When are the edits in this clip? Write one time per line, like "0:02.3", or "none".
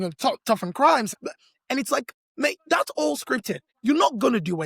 0:01.1
0:03.6